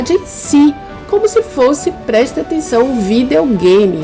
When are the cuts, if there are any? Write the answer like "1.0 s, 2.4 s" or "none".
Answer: none